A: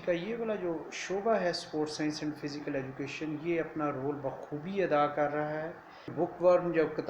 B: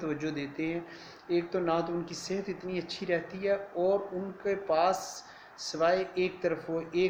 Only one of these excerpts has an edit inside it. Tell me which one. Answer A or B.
A